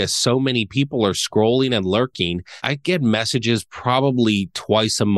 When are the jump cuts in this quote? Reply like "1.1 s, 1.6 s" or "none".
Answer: 2.7 s